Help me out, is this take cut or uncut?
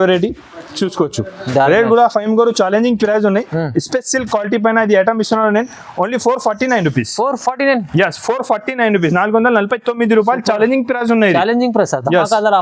uncut